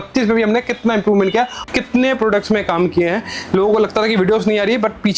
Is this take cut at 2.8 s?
no; 1 cut; at 1.6 s

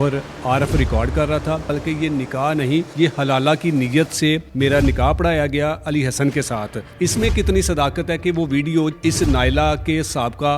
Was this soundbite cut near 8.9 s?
yes; 5 cuts; at 1.7 s, 2.9 s, 4.5 s, 6.8 s, 8.9 s

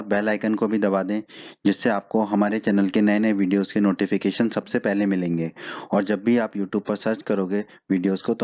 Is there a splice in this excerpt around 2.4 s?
no; 1 cut; at 4.1 s

